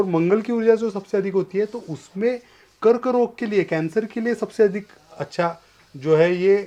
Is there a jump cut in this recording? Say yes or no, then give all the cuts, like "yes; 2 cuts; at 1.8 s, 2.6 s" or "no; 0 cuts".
no; 0 cuts